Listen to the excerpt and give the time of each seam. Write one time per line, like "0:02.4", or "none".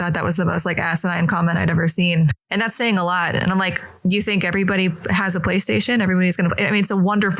0:02.4